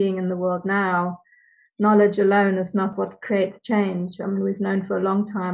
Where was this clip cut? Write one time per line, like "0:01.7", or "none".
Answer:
0:02.9